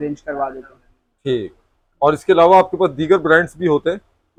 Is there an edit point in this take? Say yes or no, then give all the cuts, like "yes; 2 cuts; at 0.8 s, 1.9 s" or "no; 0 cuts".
no; 0 cuts